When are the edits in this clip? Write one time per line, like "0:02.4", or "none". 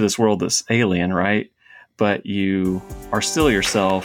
none